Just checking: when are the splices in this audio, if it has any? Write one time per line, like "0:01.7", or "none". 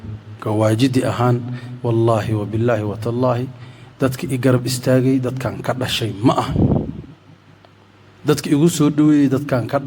none

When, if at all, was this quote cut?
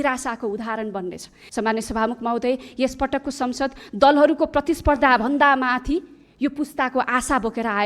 0:01.3

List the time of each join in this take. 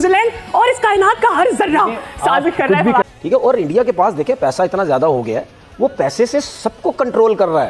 0:03.2

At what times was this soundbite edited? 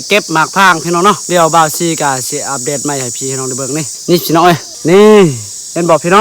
0:01.2
0:03.9
0:04.7

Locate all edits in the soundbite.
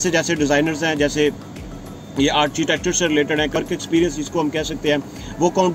0:03.5

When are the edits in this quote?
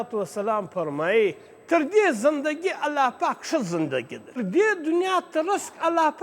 0:04.4

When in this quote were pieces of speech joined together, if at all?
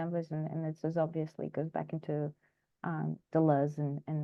none

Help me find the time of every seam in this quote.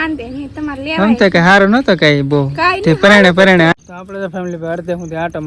0:03.7

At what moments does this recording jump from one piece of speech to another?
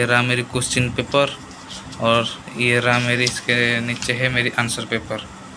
none

